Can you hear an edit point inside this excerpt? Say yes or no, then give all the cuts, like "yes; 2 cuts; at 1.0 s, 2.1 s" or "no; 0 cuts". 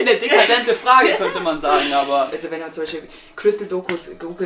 yes; 1 cut; at 2.4 s